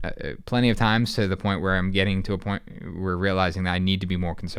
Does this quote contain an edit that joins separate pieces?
no; 0 cuts

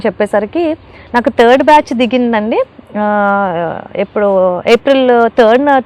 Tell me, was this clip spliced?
no; 0 cuts

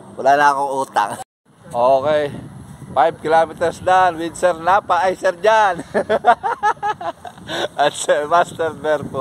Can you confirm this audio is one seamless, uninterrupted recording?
no; 1 cut; at 1.2 s

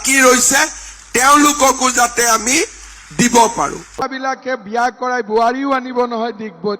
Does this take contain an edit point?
yes; 1 cut; at 4.0 s

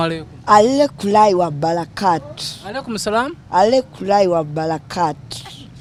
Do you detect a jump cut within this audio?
no; 0 cuts

